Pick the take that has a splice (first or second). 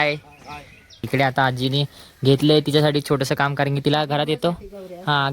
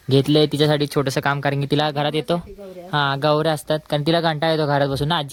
first